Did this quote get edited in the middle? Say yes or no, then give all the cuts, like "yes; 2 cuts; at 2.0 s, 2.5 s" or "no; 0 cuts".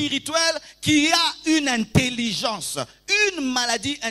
no; 0 cuts